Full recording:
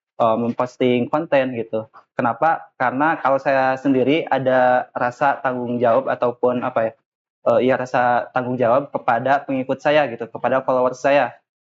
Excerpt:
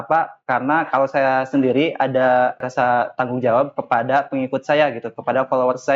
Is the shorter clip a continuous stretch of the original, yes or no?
no